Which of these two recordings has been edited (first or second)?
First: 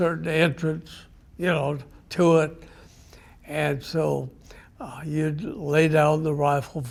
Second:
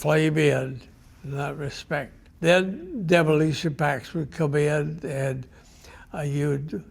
second